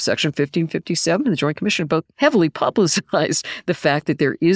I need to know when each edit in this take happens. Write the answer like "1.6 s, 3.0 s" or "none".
2.1 s